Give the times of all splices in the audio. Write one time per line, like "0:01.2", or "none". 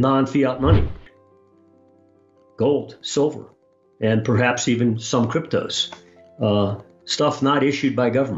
none